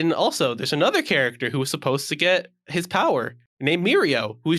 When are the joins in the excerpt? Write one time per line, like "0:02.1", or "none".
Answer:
0:03.4